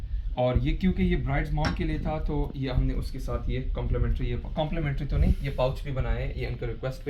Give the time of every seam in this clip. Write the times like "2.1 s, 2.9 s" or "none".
none